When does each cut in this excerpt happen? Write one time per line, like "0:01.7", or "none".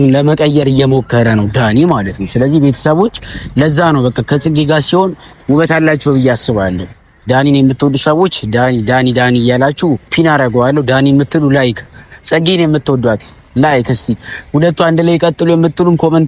none

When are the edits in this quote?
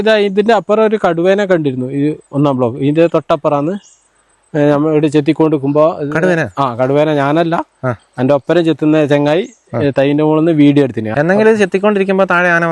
0:11.0

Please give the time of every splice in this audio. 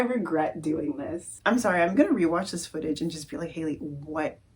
0:01.4

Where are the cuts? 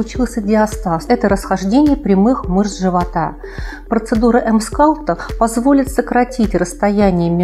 0:01.0
0:03.7

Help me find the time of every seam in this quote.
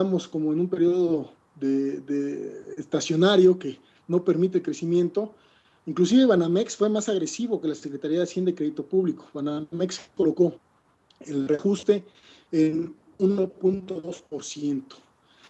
0:05.9

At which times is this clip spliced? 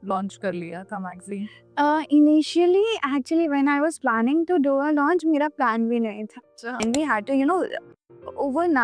0:06.8

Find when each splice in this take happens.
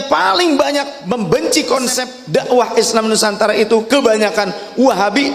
0:00.9
0:02.1

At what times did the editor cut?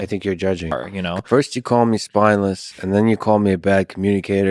0:01.0

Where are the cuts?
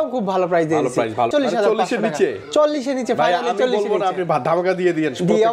0:01.3

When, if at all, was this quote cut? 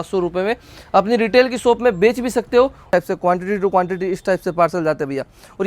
0:02.9

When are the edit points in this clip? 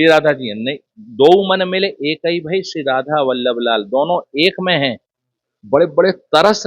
0:05.4

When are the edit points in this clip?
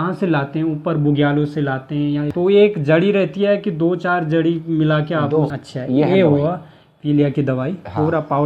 0:02.3
0:05.6

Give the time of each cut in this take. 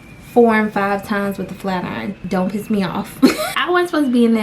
0:02.2
0:03.5

